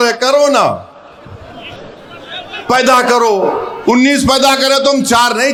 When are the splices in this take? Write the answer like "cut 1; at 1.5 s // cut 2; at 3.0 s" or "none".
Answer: none